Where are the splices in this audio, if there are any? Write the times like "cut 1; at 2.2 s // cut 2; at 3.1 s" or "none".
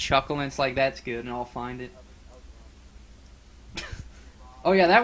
cut 1; at 2.1 s